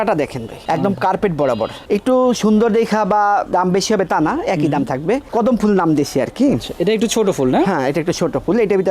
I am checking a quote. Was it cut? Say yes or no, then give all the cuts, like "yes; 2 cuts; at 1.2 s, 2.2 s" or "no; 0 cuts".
yes; 2 cuts; at 1.8 s, 5.3 s